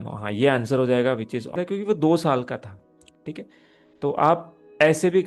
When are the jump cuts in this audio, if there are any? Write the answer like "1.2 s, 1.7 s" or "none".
1.6 s